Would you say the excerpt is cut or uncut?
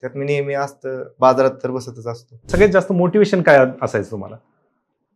cut